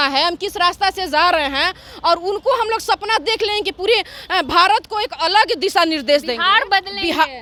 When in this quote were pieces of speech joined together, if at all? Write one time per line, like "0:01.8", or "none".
none